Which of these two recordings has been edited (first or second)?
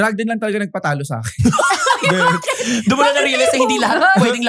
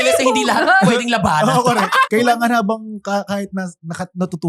second